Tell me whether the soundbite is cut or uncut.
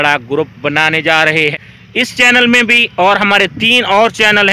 cut